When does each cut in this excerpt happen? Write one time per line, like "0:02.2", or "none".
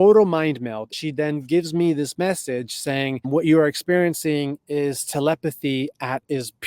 0:00.9
0:03.3